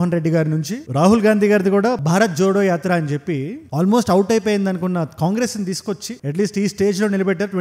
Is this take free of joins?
yes; 0 cuts

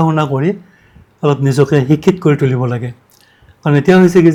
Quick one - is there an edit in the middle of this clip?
no; 0 cuts

